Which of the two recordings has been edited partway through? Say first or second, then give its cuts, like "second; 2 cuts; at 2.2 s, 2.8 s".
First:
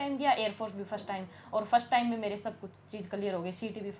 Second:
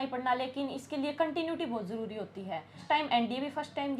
second; 1 cut; at 2.8 s